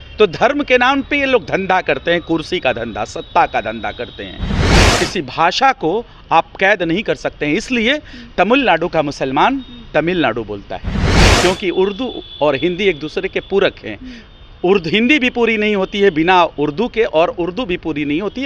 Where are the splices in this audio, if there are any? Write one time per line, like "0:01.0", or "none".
0:04.7
0:11.2